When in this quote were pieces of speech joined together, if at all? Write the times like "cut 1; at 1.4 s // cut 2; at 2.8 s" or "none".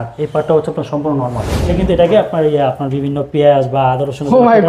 cut 1; at 1.7 s